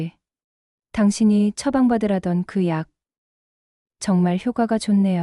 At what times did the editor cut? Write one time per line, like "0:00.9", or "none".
none